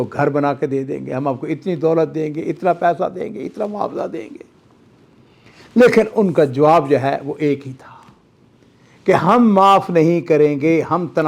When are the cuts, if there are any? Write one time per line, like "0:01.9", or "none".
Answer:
none